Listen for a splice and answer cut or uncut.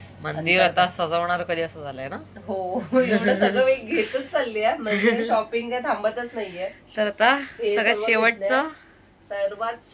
uncut